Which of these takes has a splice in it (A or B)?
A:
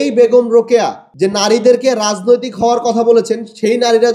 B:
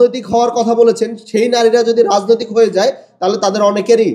A